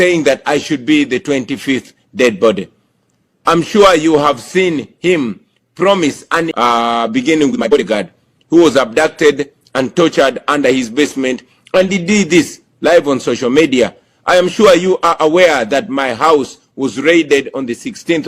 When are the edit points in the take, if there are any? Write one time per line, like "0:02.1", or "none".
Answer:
0:06.5
0:07.7